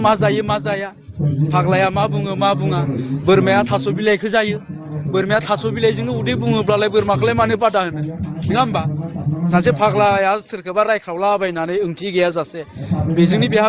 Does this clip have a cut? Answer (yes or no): no